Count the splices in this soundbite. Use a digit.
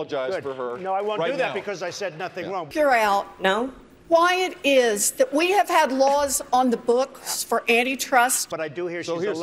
2